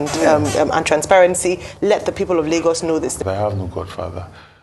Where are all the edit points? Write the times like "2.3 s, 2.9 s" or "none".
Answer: 3.2 s